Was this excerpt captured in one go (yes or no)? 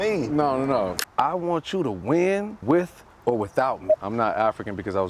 no